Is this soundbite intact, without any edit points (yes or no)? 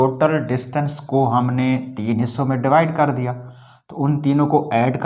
yes